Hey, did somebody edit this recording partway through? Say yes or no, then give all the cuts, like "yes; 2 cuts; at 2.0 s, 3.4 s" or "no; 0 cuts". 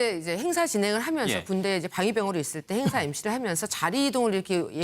yes; 1 cut; at 3.7 s